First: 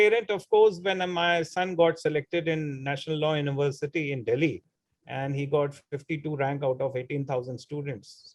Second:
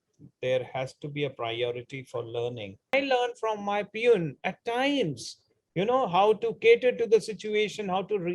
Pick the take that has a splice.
second; 1 cut; at 2.9 s

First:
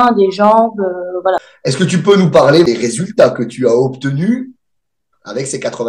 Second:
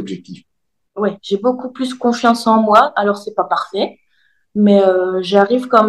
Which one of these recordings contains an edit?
first; 2 cuts; at 1.5 s, 2.7 s

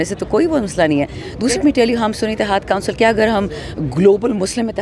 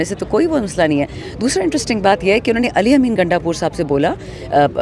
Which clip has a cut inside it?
first; 1 cut; at 1.6 s

